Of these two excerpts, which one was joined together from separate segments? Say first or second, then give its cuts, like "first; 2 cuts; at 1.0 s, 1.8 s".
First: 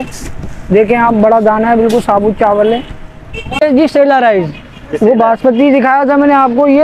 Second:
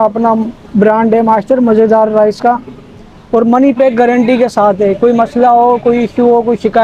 first; 1 cut; at 3.6 s